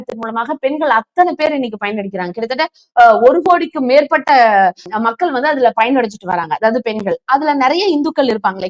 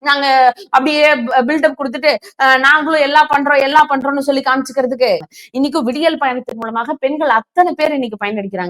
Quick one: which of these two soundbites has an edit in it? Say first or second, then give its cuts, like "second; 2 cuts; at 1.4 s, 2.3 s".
second; 1 cut; at 5.2 s